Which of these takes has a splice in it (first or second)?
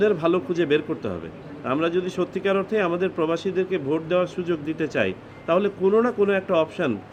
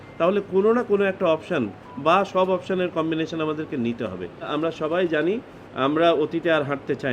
second